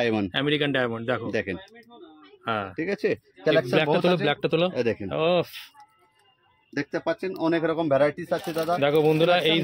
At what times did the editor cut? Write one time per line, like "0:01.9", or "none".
none